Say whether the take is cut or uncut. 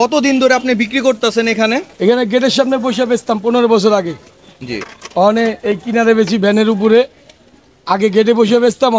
uncut